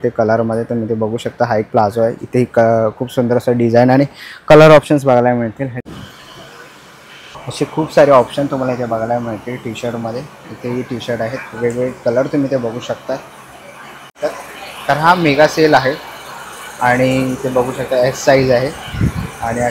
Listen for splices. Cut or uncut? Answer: cut